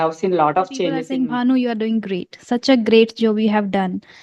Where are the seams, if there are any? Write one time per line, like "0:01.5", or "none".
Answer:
0:01.0